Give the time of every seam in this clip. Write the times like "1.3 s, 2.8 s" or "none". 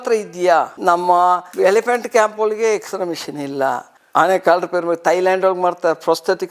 4.0 s